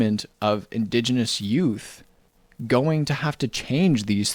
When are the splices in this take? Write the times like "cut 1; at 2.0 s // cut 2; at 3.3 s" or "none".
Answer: none